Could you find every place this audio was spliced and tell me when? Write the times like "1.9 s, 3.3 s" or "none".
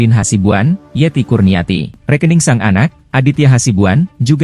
2.0 s